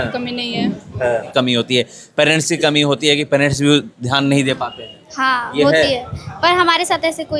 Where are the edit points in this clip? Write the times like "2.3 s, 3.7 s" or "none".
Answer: 1.3 s